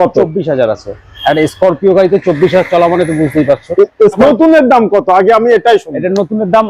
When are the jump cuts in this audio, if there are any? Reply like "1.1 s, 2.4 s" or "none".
4.2 s